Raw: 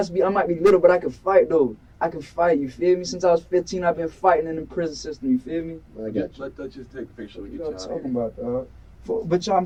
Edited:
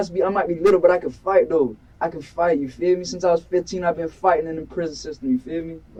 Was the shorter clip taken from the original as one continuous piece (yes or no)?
yes